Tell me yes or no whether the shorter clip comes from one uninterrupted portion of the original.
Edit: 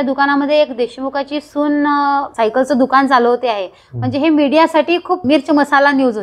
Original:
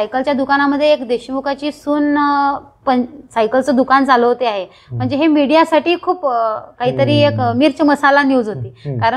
no